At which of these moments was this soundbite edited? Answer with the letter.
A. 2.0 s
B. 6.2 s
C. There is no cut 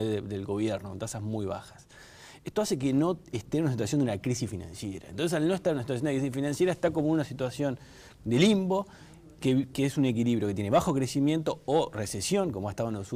C